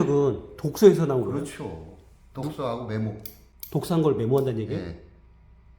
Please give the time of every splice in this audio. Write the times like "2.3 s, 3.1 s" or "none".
none